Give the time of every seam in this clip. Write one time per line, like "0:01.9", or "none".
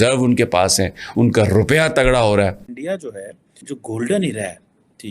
0:02.7
0:03.6